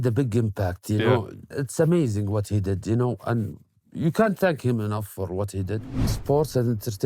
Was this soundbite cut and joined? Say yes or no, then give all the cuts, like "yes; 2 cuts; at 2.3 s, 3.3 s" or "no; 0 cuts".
yes; 2 cuts; at 1.5 s, 5.8 s